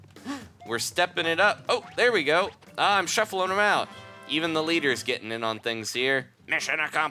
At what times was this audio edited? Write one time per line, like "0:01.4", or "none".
none